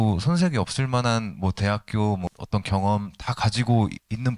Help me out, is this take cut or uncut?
uncut